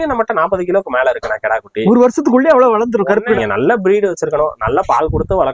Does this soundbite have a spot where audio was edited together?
yes; 1 cut; at 3.4 s

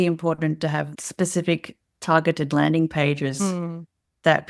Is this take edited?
yes; 1 cut; at 1.0 s

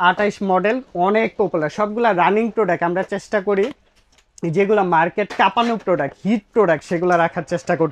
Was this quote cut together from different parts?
no; 0 cuts

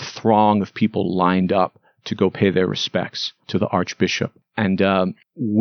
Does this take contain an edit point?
no; 0 cuts

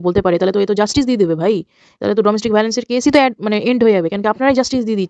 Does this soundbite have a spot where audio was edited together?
no; 0 cuts

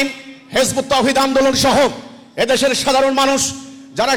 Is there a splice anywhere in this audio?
no; 0 cuts

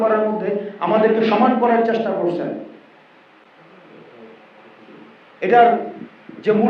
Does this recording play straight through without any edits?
yes; 0 cuts

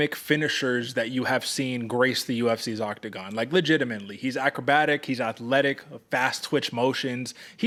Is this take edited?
no; 0 cuts

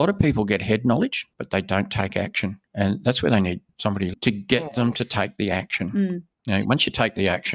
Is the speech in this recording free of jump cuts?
no; 4 cuts; at 1.3 s, 2.6 s, 4.1 s, 6.3 s

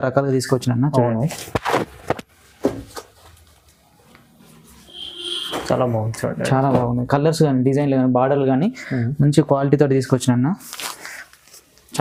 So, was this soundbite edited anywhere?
no; 0 cuts

